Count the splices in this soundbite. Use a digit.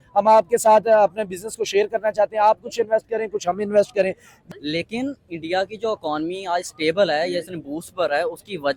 1